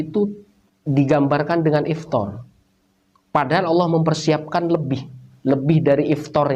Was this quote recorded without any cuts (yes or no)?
yes